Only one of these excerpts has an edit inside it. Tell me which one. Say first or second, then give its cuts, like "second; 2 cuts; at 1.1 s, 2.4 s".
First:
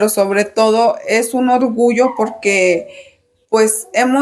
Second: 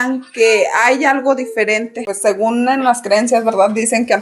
second; 1 cut; at 2.1 s